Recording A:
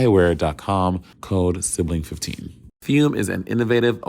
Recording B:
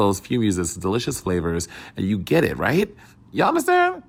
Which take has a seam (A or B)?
A